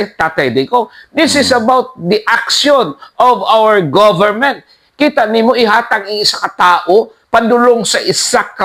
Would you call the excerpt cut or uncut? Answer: uncut